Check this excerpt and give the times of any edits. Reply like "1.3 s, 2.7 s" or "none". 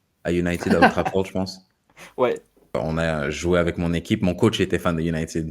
2.8 s